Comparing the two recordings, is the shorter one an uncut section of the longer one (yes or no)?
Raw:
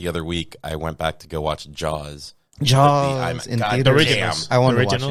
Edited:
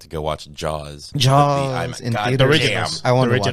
no